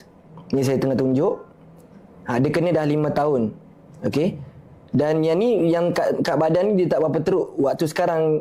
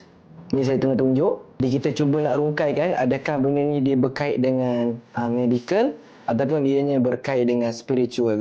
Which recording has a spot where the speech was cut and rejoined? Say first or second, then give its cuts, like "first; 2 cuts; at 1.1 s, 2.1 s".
second; 1 cut; at 1.6 s